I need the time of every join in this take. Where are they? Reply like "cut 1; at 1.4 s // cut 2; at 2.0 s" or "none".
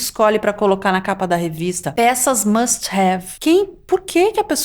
cut 1; at 1.8 s // cut 2; at 3.3 s